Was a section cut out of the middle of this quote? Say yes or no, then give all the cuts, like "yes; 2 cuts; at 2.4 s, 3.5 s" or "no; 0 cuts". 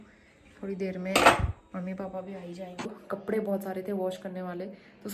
yes; 1 cut; at 2.9 s